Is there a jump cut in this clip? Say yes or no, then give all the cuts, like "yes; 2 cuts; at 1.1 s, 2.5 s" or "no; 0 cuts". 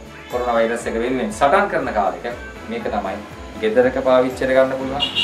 no; 0 cuts